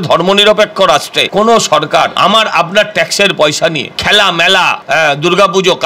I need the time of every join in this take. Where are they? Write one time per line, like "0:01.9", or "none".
0:01.2
0:02.1
0:03.9
0:04.8